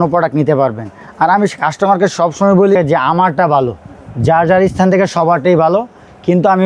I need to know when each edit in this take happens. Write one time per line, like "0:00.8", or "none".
0:02.8